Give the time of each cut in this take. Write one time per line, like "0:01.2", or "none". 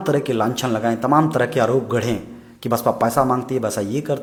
none